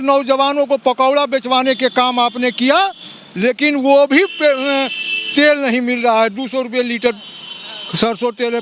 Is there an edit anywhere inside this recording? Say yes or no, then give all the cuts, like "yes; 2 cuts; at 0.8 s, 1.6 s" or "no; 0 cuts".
no; 0 cuts